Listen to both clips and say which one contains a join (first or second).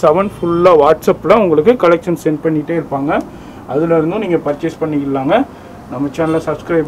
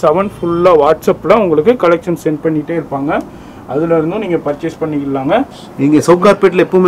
second